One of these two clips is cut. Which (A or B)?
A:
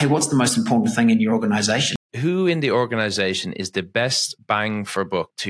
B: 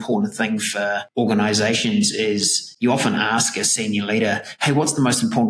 A